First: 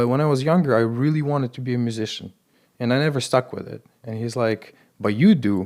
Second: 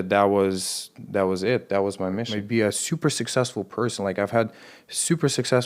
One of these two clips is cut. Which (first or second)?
second